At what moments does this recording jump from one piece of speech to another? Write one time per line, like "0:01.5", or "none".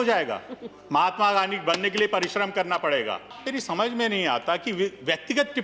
0:03.4